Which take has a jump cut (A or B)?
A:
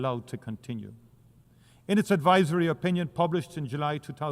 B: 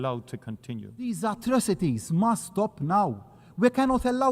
B